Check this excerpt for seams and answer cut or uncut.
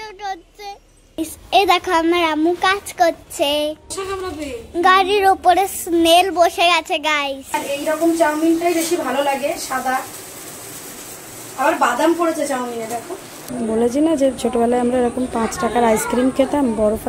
cut